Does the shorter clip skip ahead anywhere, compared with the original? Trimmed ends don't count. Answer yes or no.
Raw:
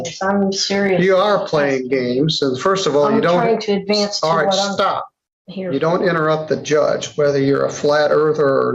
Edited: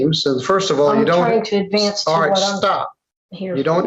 no